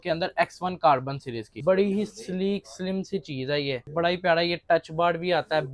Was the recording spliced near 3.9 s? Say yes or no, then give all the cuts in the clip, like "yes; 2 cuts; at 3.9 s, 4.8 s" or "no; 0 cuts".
yes; 2 cuts; at 1.5 s, 3.9 s